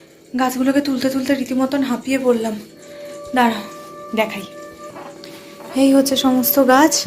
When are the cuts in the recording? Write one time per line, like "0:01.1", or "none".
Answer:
none